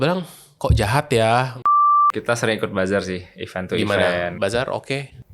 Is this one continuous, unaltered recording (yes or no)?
no